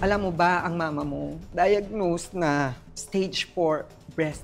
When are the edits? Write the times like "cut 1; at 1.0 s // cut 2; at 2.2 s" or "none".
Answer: none